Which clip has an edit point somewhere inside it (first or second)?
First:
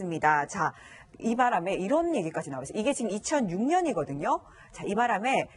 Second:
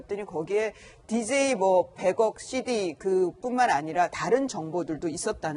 first